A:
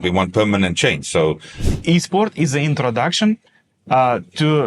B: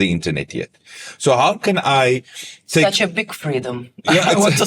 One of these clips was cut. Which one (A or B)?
A